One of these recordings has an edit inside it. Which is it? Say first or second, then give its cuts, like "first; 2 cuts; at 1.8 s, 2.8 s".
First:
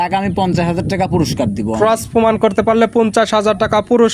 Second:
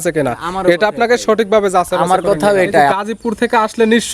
second; 1 cut; at 3.0 s